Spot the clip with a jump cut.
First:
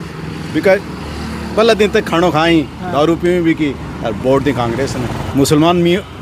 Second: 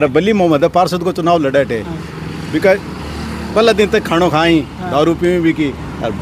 first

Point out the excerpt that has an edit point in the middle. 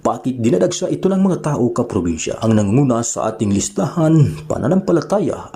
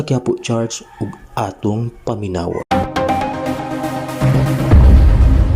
second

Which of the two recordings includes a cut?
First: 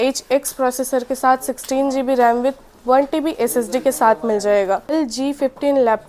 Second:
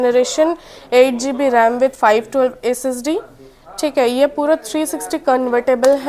first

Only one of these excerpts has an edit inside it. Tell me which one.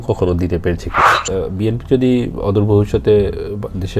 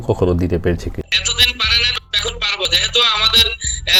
first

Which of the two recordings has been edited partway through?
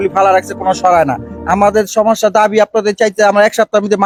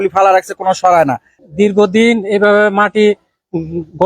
second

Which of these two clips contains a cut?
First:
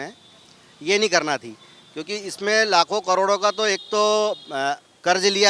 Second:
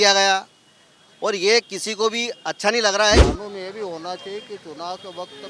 second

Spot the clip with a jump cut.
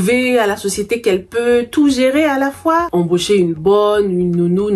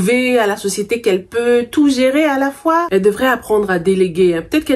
first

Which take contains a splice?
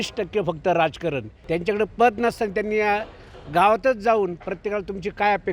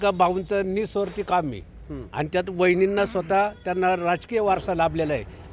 first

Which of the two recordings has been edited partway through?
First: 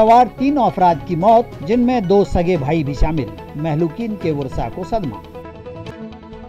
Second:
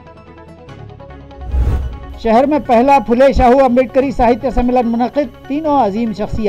second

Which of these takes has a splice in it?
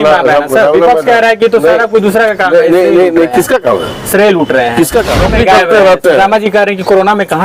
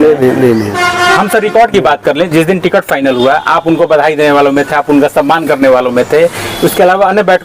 first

